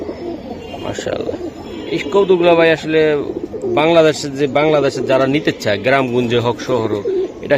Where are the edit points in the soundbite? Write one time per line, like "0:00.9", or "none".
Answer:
none